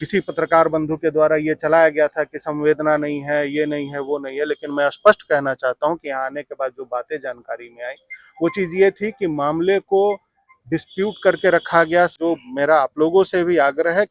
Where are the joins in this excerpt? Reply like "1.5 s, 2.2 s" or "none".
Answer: 12.1 s